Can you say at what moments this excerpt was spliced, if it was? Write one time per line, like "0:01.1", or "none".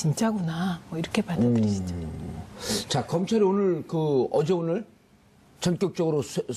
none